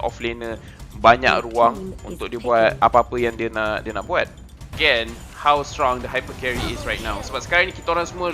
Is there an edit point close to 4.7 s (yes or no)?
yes